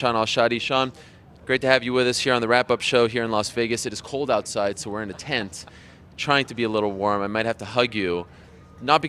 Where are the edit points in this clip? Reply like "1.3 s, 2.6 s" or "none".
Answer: 1.4 s